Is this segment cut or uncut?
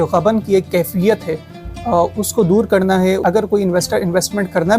cut